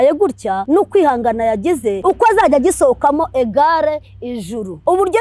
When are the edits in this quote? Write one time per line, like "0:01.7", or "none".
none

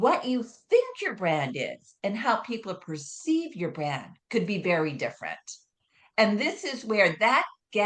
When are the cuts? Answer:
none

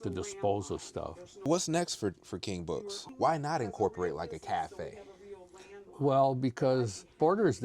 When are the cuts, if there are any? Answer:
0:02.9

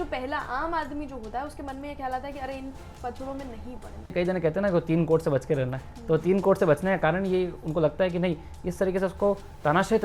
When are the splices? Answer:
0:04.1

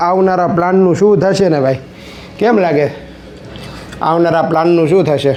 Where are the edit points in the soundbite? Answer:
none

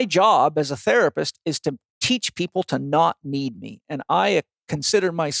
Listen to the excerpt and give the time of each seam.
none

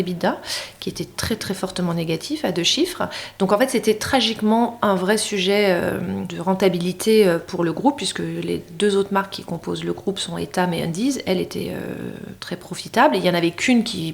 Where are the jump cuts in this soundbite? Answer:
0:06.3

